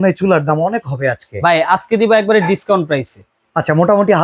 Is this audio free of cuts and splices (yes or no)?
yes